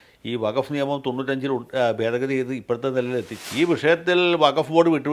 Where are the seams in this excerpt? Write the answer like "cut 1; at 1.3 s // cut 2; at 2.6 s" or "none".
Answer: cut 1; at 3.4 s